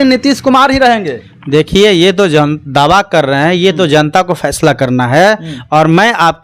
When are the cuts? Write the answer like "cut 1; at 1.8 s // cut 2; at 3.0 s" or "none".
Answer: none